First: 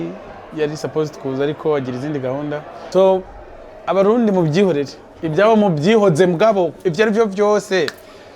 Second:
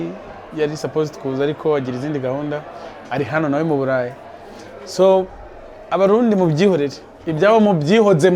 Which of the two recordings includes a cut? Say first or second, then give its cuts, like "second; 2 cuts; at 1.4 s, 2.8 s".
first; 1 cut; at 2.7 s